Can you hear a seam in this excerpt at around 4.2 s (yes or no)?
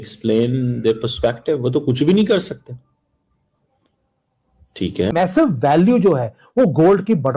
no